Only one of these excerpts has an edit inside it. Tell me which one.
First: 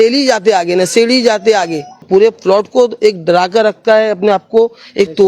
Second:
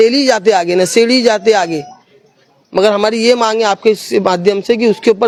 first; 1 cut; at 2.0 s

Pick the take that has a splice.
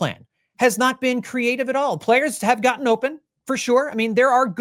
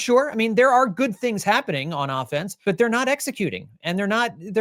second; 1 cut; at 2.5 s

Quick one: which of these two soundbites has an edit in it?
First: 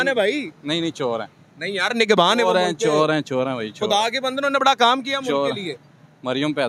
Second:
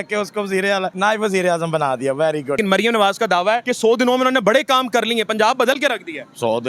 second; 3 cuts; at 0.9 s, 2.6 s, 3.7 s

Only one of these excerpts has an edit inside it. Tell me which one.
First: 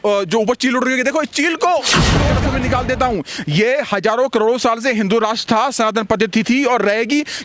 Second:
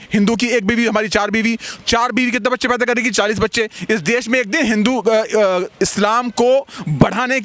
first; 1 cut; at 2.3 s

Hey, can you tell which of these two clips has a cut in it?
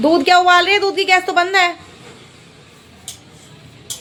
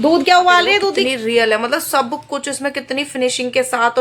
second; 1 cut; at 1.0 s

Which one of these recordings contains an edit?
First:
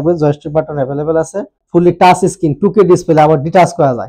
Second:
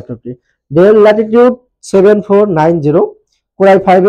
first; 1 cut; at 1.6 s

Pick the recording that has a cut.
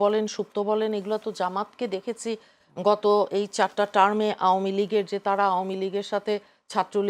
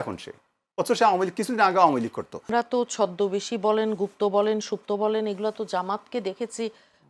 second; 1 cut; at 2.4 s

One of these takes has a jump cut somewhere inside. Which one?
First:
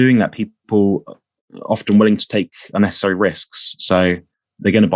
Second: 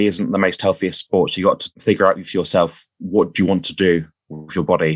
second; 1 cut; at 1.7 s

